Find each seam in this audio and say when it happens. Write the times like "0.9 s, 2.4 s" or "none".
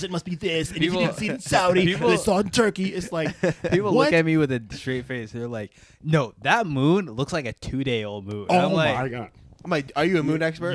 none